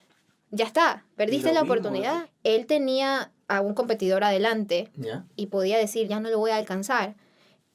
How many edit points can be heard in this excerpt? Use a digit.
2